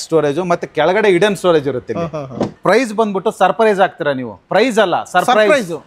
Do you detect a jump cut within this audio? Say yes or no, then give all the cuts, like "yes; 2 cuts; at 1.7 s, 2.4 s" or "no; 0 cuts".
yes; 1 cut; at 2.6 s